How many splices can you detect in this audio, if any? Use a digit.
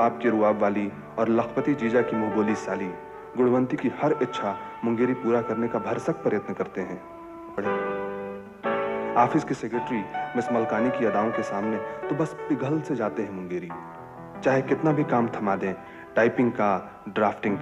1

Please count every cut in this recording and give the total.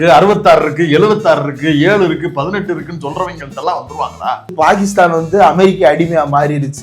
1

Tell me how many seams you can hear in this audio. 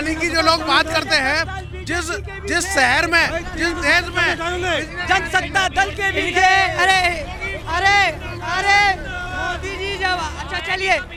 0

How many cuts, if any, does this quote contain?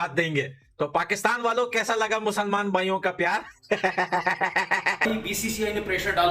1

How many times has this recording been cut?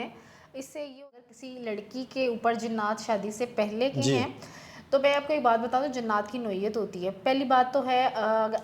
1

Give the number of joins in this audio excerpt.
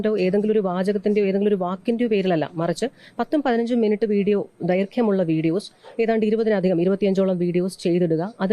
0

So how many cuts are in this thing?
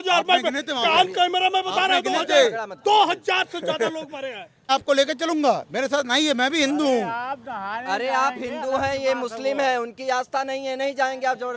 1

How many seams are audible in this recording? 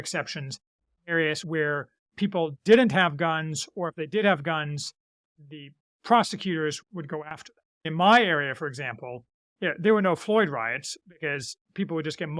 1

